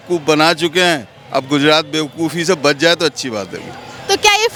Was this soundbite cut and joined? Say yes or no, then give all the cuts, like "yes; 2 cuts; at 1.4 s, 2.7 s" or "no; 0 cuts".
no; 0 cuts